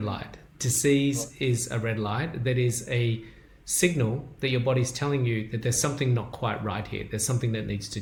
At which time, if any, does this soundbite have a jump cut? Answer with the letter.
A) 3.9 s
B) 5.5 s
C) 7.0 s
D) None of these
D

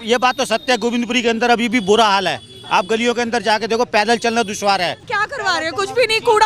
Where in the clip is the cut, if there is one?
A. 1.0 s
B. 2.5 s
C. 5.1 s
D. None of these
C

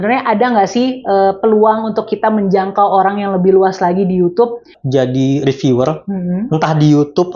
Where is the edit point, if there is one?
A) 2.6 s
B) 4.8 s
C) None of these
B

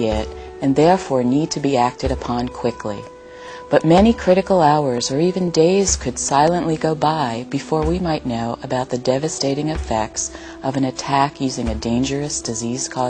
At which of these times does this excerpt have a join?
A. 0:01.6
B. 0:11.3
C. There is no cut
B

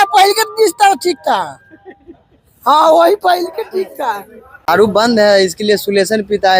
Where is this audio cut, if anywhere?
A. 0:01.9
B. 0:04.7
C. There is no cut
B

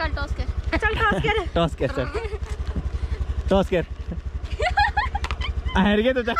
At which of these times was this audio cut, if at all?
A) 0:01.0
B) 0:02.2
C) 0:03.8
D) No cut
D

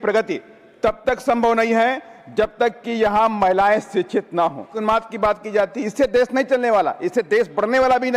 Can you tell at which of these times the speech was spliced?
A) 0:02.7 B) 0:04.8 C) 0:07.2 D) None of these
B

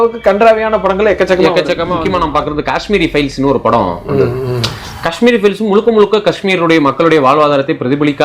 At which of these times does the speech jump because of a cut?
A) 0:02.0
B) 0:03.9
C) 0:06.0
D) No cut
A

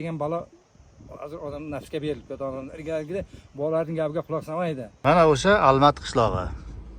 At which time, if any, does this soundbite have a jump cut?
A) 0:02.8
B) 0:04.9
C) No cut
B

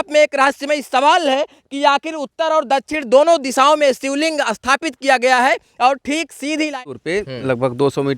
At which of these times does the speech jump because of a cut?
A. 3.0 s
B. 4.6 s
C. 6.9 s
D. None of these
C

